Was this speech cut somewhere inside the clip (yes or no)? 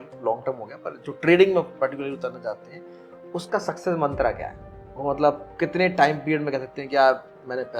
no